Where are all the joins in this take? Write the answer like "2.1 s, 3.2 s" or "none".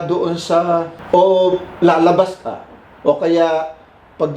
0.9 s